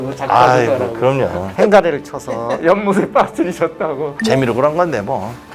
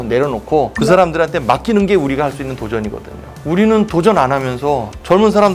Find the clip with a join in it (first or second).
first